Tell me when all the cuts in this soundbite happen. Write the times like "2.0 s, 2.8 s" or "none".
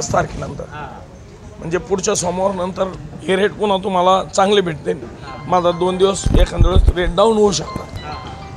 none